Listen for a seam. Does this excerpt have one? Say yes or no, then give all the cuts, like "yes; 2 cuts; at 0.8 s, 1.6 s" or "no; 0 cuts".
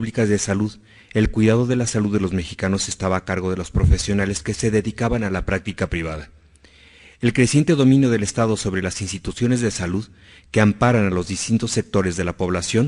yes; 1 cut; at 3.9 s